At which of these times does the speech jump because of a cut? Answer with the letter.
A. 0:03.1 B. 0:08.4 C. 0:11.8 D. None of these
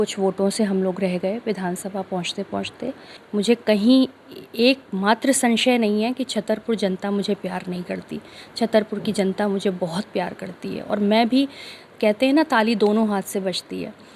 A